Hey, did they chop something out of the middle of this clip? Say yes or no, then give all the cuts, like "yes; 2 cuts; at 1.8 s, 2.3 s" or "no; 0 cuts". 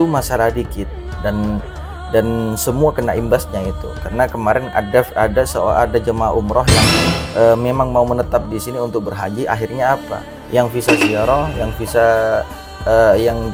no; 0 cuts